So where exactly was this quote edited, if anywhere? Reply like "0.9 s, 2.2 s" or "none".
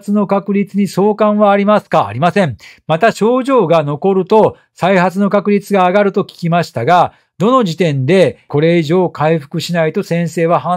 none